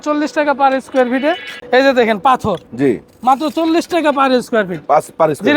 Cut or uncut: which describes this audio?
cut